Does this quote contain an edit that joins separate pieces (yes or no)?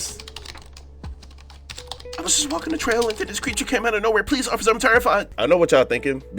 no